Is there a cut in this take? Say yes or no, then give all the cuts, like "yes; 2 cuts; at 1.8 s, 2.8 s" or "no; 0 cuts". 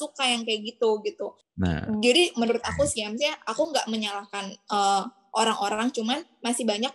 yes; 1 cut; at 1.4 s